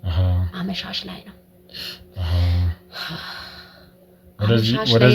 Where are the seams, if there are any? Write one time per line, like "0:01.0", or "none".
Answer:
none